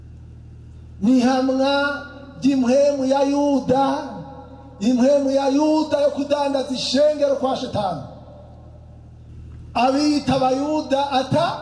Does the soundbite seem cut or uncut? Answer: cut